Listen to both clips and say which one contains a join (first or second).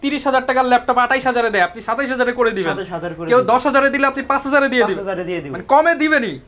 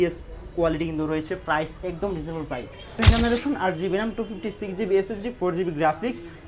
second